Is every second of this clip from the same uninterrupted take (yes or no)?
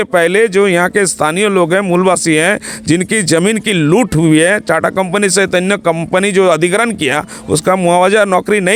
yes